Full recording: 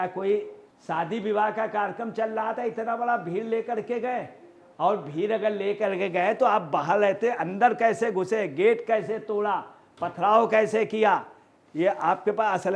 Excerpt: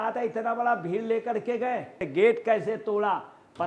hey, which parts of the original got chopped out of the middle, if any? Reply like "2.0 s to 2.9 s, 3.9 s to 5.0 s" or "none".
4.5 s to 8.5 s